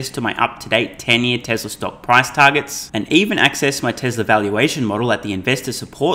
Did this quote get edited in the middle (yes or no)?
no